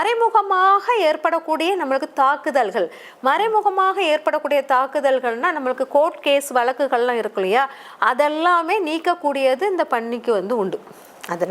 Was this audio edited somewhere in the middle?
no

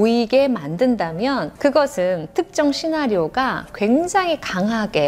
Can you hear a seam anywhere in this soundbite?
yes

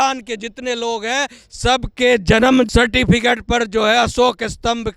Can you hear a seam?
yes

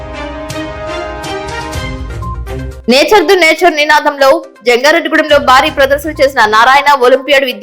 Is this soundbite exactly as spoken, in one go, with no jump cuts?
no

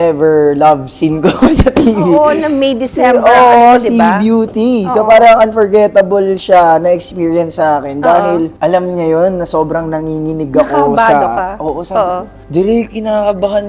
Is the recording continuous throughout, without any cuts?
yes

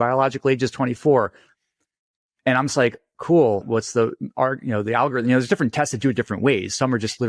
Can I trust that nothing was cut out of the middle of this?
no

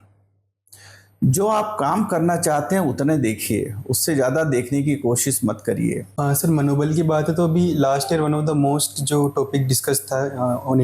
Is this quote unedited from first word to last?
no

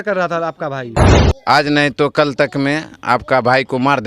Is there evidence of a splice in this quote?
yes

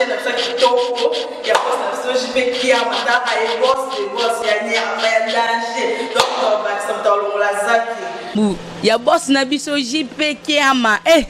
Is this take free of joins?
yes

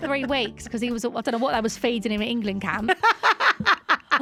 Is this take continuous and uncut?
yes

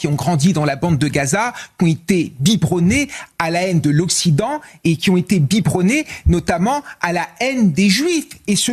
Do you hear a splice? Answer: no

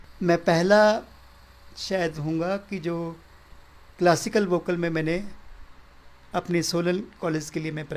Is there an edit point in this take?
no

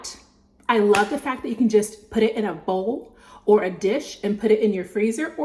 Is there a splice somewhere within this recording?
no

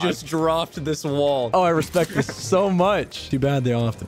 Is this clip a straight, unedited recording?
no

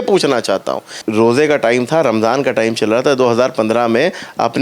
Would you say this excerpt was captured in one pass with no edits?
no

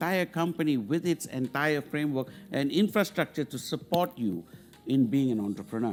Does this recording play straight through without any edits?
yes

